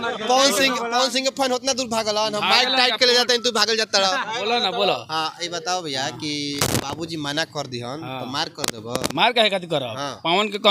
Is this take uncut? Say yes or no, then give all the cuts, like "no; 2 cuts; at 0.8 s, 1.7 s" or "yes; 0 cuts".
yes; 0 cuts